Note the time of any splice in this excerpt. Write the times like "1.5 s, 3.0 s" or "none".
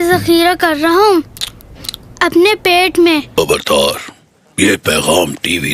3.3 s